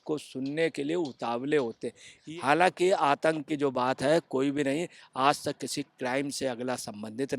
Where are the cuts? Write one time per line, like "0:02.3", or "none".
0:02.2